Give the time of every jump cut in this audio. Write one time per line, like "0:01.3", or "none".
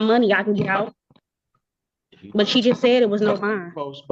none